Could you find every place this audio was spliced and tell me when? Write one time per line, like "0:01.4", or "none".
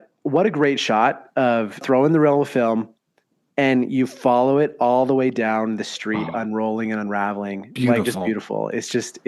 0:01.8